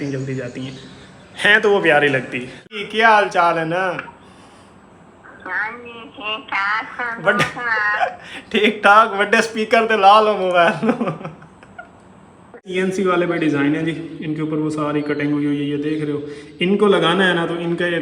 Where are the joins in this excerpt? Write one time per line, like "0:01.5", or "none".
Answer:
0:02.6
0:12.7